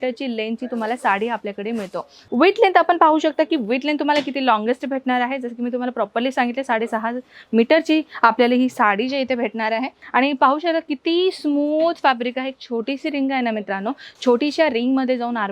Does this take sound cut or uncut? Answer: cut